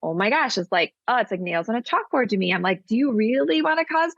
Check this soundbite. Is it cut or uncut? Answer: uncut